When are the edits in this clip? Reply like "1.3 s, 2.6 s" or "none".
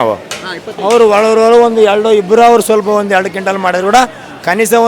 none

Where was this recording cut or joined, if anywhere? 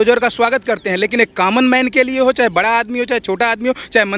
none

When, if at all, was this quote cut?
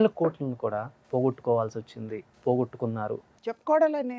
1.0 s, 2.2 s, 3.3 s

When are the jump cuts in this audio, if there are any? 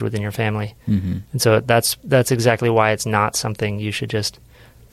none

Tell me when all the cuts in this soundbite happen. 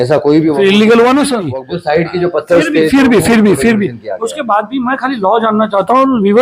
1.6 s

